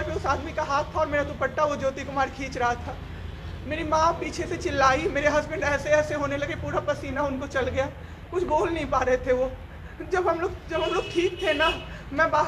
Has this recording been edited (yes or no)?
no